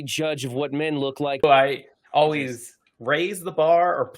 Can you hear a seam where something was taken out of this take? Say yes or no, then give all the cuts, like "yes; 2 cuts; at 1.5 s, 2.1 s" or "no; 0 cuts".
yes; 1 cut; at 1.4 s